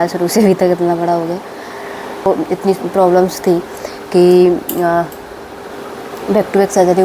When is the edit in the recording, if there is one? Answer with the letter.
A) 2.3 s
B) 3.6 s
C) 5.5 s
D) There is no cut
A